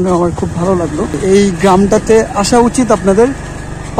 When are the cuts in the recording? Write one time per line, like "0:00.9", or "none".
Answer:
0:01.2